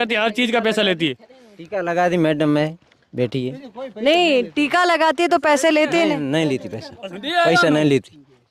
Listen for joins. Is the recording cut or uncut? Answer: uncut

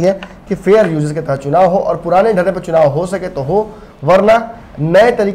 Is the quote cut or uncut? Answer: uncut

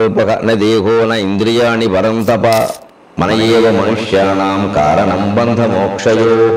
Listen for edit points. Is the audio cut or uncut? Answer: uncut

